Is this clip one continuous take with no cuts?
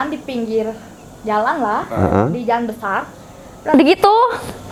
yes; 0 cuts

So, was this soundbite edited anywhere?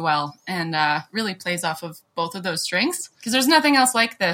yes; 1 cut; at 3.1 s

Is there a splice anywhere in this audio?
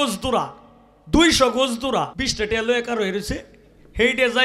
yes; 1 cut; at 2.1 s

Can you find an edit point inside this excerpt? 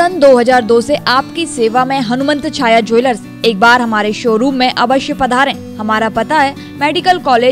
no; 0 cuts

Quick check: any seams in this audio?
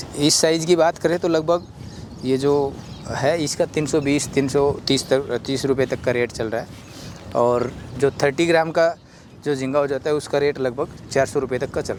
no; 0 cuts

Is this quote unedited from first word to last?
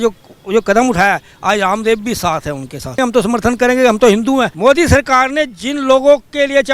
no; 2 cuts; at 3.0 s, 4.5 s

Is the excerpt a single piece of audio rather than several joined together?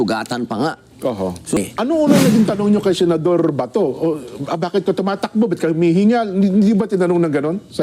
no; 1 cut; at 1.6 s

